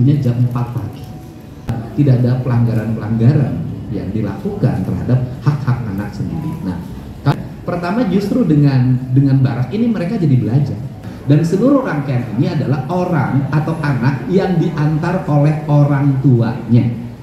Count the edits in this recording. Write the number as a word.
three